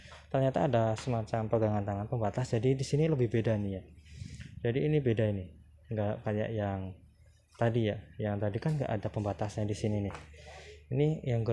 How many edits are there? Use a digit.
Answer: 0